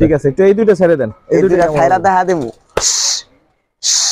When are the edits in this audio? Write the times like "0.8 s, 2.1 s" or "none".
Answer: none